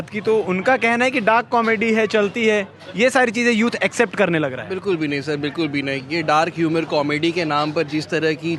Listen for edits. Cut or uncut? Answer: uncut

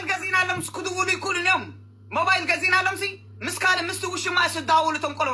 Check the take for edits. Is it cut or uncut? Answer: uncut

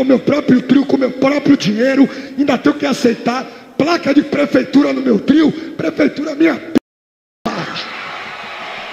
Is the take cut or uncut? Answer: uncut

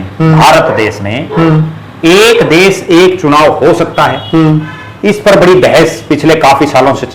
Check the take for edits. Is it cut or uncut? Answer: uncut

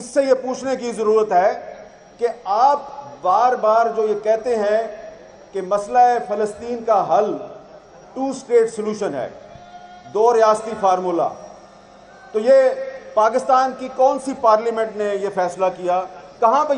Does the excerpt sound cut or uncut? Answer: uncut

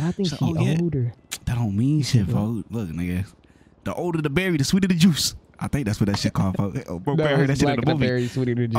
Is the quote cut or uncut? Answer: uncut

